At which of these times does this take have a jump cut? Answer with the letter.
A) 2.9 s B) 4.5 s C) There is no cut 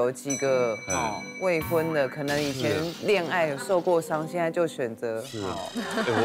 C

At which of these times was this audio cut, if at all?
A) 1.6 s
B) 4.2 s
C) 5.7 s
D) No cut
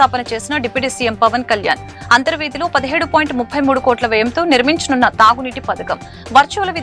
D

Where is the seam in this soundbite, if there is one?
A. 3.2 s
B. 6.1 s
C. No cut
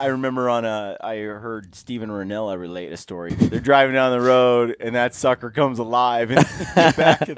A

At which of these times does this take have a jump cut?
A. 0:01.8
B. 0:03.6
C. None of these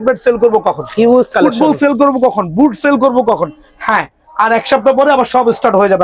C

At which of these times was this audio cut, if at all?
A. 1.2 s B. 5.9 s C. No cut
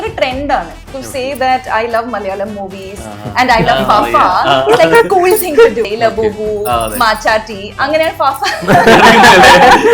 B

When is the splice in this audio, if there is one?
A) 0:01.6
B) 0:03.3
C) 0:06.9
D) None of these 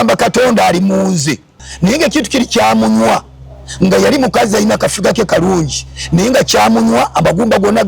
A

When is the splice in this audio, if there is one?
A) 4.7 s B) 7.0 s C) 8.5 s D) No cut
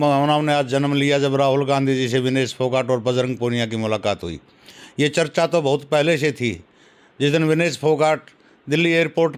D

